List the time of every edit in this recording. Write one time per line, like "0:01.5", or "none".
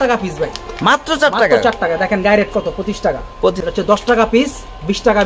0:03.6